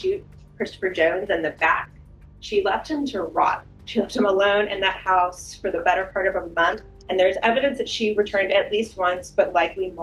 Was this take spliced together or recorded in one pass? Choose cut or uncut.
cut